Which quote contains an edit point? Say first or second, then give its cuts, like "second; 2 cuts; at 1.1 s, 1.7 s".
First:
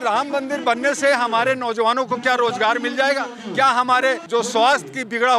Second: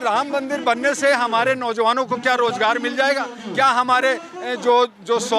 first; 1 cut; at 4.2 s